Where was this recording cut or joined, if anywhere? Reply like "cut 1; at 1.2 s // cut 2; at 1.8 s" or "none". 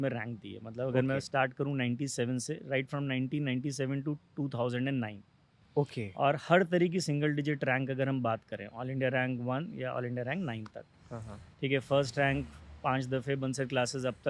none